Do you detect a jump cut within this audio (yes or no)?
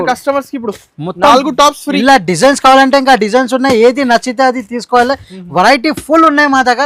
no